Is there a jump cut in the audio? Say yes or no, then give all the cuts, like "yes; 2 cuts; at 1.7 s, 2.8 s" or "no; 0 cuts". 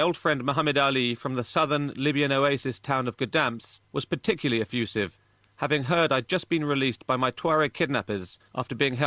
no; 0 cuts